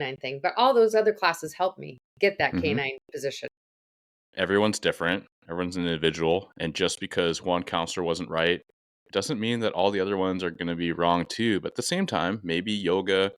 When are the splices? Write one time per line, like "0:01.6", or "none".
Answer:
0:03.7